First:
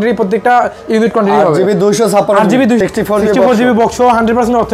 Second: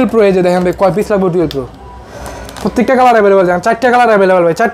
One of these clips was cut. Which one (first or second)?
first